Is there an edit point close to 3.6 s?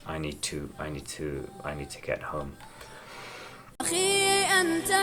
yes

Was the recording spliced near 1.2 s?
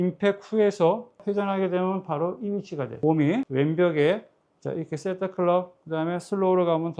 yes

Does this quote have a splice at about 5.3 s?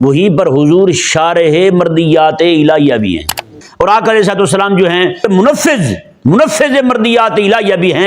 yes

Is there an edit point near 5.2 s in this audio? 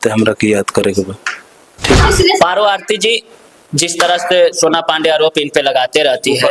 no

